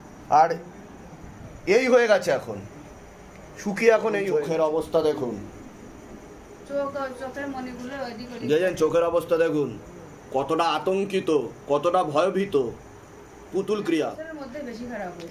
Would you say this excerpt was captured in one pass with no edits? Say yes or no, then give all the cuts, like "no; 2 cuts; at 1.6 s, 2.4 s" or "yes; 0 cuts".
no; 2 cuts; at 4.3 s, 14.2 s